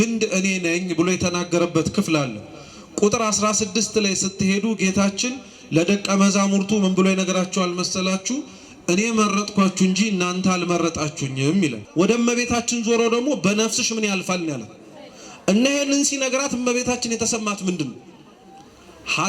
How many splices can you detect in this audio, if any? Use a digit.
1